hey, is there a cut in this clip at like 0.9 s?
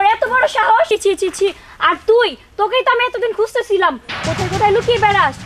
yes; 1 cut; at 0.9 s

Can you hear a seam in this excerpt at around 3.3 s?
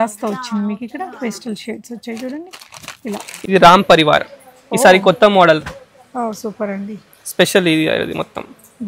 yes; 1 cut; at 3.3 s

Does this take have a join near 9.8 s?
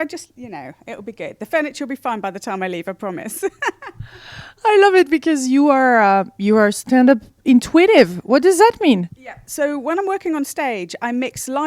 yes; 1 cut; at 9.8 s

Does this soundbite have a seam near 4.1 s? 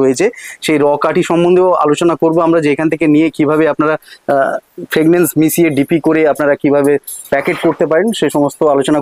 no; 0 cuts

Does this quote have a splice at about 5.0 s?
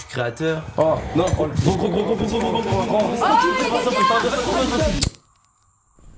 yes; 1 cut; at 5.0 s

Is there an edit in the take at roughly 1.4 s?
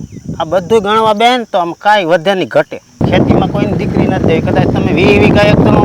no; 1 cut; at 3.0 s

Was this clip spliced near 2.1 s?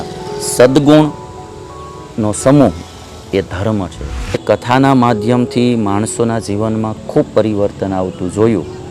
no; 1 cut; at 4.4 s

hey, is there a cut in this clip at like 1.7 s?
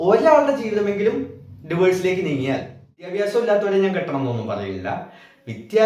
no; 1 cut; at 3.0 s

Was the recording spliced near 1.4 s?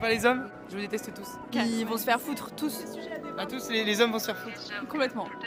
no; 0 cuts

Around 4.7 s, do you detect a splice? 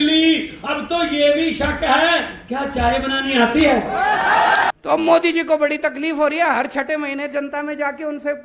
yes; 1 cut; at 4.7 s

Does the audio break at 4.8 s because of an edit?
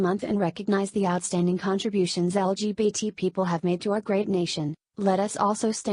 yes; 1 cut; at 4.8 s

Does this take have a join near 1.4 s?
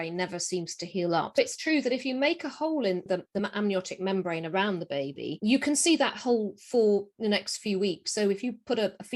yes; 2 cuts; at 1.4 s, 3.1 s

